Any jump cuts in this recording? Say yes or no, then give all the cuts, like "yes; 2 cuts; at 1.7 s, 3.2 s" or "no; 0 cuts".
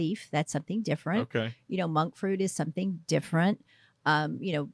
no; 0 cuts